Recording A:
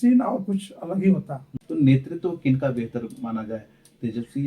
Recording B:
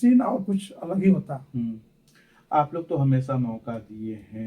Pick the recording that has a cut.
A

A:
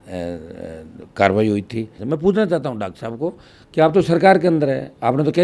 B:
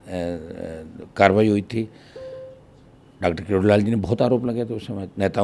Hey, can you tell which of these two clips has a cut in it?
A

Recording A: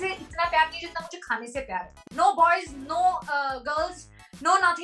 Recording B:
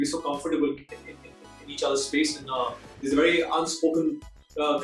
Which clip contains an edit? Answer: A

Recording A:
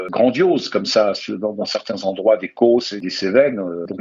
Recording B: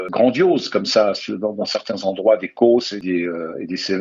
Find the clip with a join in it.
A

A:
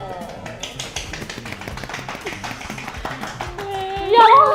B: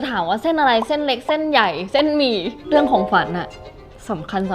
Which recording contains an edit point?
B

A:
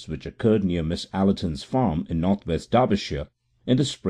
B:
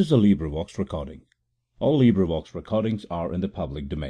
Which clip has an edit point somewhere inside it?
A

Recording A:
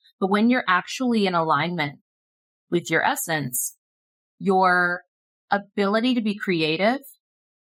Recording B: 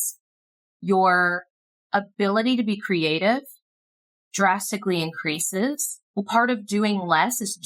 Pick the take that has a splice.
B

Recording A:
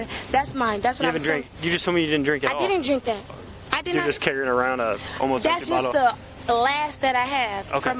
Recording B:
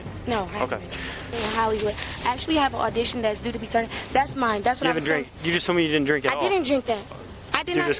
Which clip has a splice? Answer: B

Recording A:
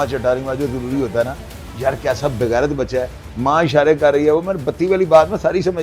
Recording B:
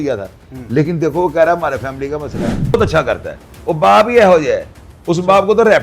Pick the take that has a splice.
B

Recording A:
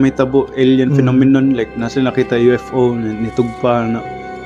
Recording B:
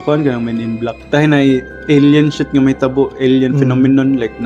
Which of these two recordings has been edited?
B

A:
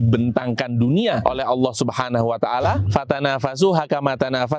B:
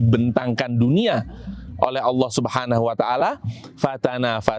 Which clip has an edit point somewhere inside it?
A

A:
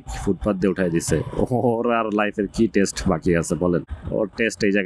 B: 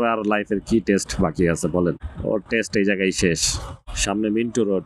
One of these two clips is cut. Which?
B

